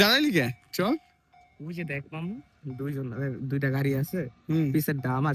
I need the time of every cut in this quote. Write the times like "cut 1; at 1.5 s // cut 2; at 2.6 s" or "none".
none